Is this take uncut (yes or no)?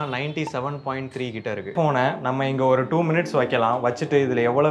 no